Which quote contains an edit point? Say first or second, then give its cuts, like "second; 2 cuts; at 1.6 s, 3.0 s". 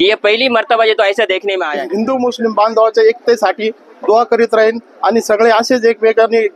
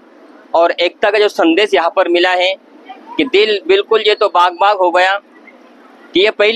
first; 1 cut; at 1.8 s